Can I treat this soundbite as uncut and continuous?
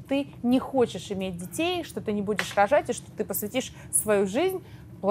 yes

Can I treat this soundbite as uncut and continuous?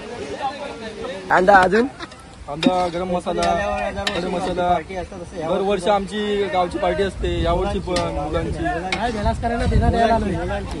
no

